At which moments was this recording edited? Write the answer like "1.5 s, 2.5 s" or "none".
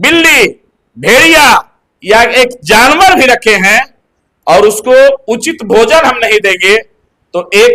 none